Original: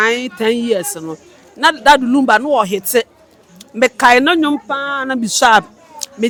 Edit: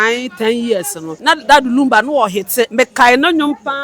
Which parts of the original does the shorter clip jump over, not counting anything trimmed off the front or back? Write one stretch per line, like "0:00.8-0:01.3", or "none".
0:01.0-0:01.4
0:03.1-0:03.7